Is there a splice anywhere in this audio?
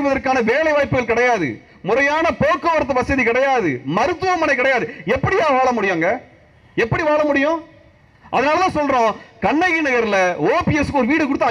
no; 0 cuts

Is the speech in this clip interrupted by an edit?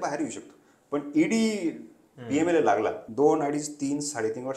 yes; 1 cut; at 3.0 s

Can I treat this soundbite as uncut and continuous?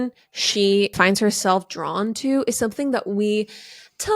no; 1 cut; at 0.9 s

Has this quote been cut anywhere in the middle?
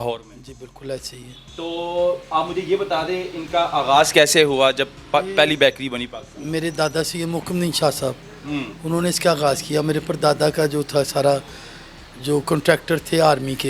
no; 0 cuts

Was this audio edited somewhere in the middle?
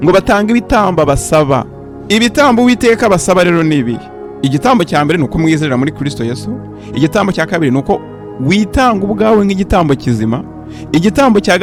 no; 0 cuts

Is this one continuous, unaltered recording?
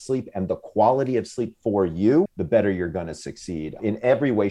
no; 2 cuts; at 2.3 s, 3.8 s

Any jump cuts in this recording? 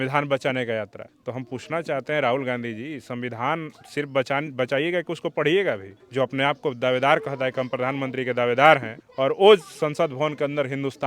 yes; 1 cut; at 6.0 s

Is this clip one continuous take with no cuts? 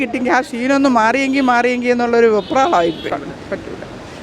no; 1 cut; at 3.0 s

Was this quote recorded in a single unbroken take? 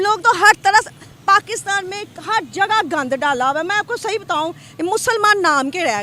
yes; 0 cuts

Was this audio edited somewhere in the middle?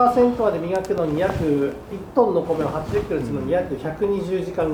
no; 0 cuts

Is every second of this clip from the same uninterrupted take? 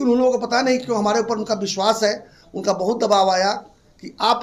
yes; 0 cuts

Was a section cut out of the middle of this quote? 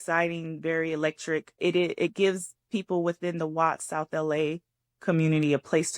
yes; 1 cut; at 1.5 s

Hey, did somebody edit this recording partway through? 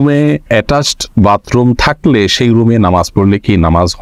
no; 0 cuts

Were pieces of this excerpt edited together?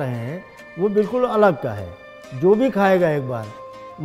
no; 0 cuts

